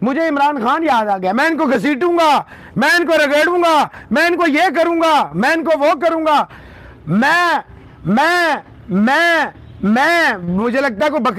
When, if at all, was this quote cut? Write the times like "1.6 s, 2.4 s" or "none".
none